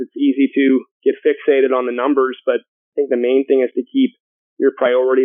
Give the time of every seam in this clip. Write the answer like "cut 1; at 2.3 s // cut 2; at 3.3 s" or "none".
cut 1; at 0.9 s // cut 2; at 2.8 s